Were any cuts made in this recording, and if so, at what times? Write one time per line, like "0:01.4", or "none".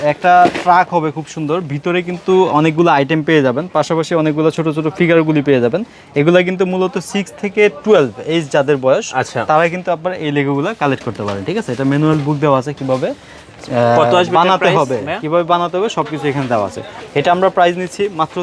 none